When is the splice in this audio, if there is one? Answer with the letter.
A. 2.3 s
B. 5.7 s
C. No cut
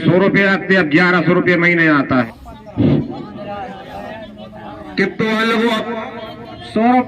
A